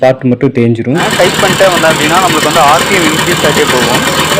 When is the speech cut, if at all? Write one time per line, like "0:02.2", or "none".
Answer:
0:01.0